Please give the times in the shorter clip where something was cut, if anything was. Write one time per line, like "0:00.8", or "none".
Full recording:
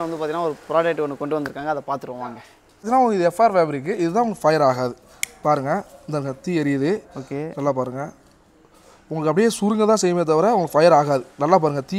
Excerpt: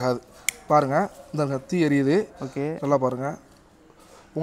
none